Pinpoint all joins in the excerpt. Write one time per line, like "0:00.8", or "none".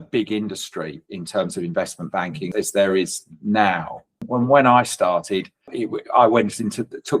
0:02.5
0:04.2
0:05.7